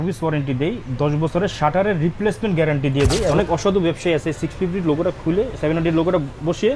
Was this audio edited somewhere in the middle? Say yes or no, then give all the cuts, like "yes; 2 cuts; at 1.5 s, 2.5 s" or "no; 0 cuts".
yes; 1 cut; at 3.3 s